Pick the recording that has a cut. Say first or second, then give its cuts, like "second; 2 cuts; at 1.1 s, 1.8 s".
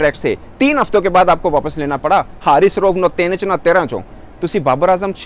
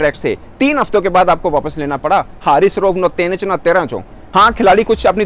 second; 1 cut; at 4.1 s